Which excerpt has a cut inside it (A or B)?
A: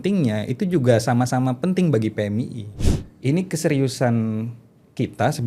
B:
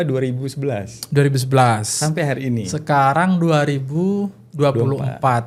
A